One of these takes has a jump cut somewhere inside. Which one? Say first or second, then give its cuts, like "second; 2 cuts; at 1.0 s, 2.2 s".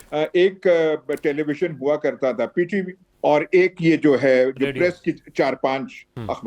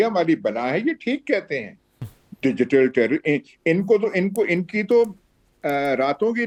first; 1 cut; at 3.0 s